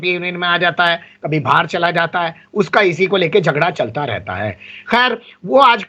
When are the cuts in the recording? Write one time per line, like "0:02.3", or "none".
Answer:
none